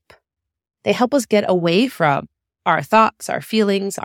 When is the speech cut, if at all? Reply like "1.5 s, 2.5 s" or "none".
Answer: none